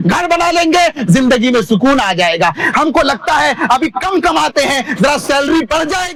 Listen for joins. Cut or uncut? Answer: uncut